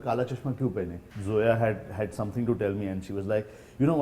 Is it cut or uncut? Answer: cut